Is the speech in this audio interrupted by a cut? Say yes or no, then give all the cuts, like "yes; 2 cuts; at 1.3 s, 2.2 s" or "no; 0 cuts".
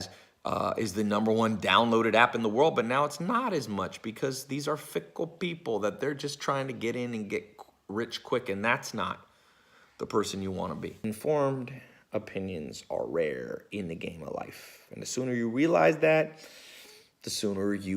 yes; 1 cut; at 11.0 s